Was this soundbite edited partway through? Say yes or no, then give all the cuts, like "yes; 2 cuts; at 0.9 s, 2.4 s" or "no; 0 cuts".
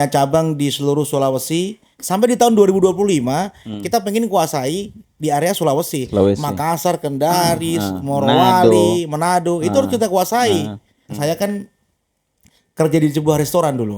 yes; 2 cuts; at 1.9 s, 11.1 s